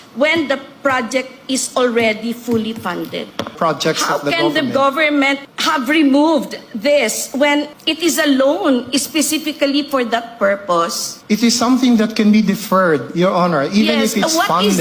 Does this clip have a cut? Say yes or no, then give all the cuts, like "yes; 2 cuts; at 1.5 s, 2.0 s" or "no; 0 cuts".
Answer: yes; 1 cut; at 3.5 s